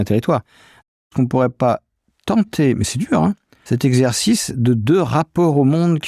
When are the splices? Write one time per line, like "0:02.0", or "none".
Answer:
0:01.0
0:03.5